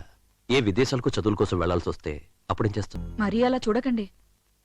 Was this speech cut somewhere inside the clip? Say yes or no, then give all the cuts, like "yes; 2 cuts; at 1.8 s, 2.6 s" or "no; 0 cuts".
yes; 1 cut; at 3.0 s